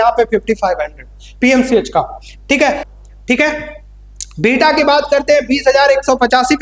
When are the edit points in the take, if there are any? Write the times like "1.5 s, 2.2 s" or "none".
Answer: 2.9 s